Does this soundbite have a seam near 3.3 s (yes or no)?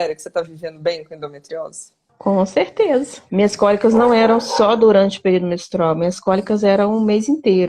yes